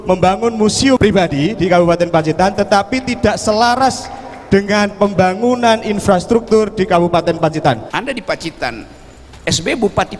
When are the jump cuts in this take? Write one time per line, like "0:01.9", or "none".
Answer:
0:01.0
0:07.9

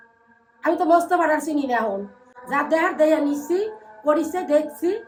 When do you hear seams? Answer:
none

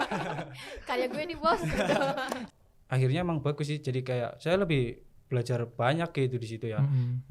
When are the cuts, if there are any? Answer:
0:02.4

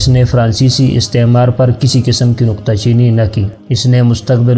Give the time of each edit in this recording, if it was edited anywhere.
0:03.5

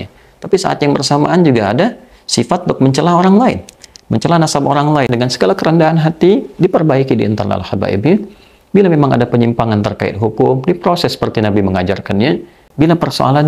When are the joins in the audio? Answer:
0:05.1
0:12.6

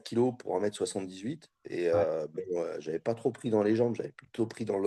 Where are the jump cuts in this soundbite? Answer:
none

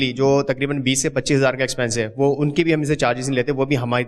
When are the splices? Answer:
none

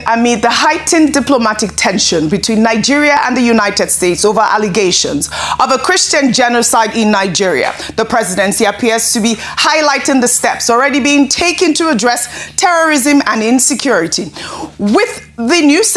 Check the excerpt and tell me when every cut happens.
none

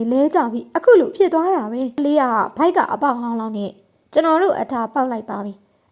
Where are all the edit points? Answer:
0:02.0

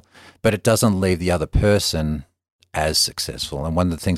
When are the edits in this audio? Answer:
none

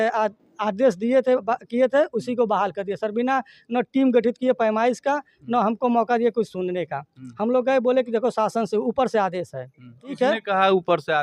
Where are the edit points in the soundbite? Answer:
0:10.1

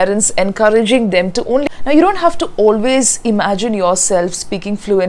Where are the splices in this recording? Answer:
0:01.6

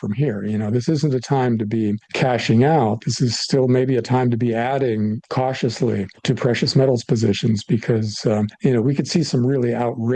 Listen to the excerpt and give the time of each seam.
0:02.1
0:05.2
0:06.1
0:08.5

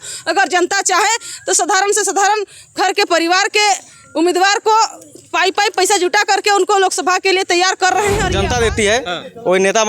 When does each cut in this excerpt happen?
0:08.3

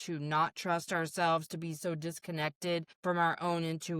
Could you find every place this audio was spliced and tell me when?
0:02.9

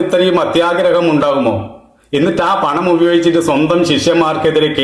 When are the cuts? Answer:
none

